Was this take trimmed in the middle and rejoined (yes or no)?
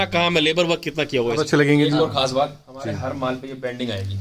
yes